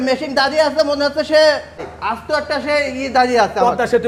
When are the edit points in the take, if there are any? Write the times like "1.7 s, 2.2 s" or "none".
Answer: none

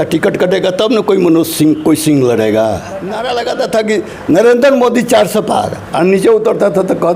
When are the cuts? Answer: 3.1 s

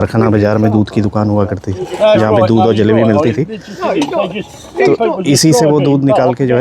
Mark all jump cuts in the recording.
none

